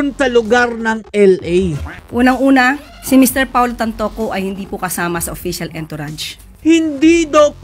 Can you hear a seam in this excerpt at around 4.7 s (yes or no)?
no